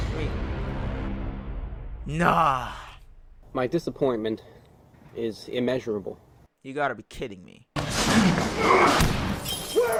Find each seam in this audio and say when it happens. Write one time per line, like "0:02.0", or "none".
none